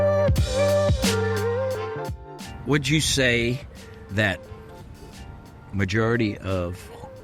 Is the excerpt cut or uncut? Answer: cut